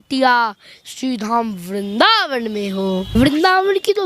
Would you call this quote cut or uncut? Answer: cut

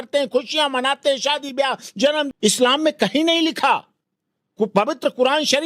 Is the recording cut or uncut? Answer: cut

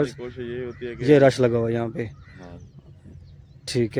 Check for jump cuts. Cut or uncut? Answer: uncut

